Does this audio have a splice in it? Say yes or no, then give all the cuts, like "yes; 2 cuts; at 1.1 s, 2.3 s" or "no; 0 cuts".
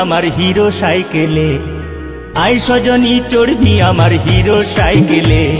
no; 0 cuts